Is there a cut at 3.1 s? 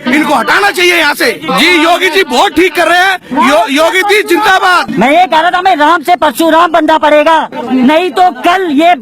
no; 3 cuts; at 1.4 s, 4.9 s, 7.6 s

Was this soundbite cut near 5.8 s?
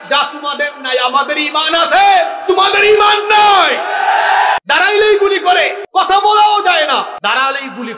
yes; 3 cuts; at 4.6 s, 5.8 s, 7.2 s

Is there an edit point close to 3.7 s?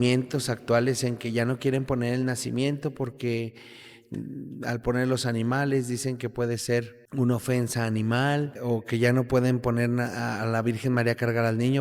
no; 2 cuts; at 7.0 s, 8.6 s

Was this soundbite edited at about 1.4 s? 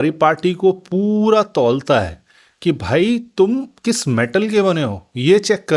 no; 0 cuts

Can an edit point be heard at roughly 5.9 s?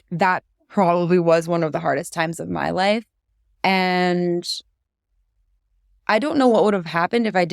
yes; 1 cut; at 5.9 s

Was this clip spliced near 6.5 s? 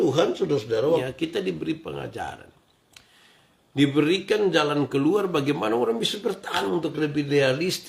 yes; 2 cuts; at 1.0 s, 6.5 s

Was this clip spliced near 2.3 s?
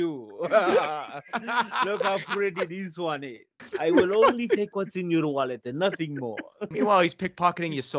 no; 2 cuts; at 3.6 s, 6.7 s

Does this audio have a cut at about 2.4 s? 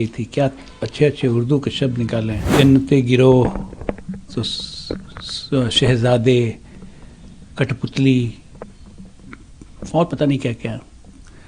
yes; 1 cut; at 2.4 s

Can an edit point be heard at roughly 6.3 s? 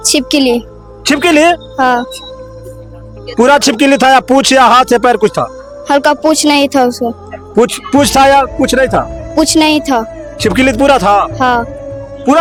no; 0 cuts

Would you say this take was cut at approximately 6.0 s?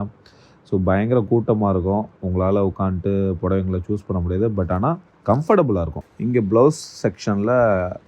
yes; 1 cut; at 6.0 s

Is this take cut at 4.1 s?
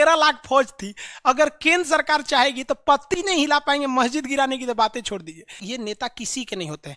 no; 1 cut; at 5.6 s

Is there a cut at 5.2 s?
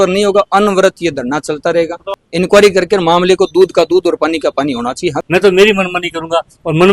yes; 2 cuts; at 2.2 s, 5.2 s

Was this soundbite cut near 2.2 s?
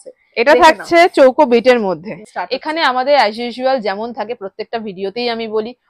yes; 1 cut; at 2.2 s

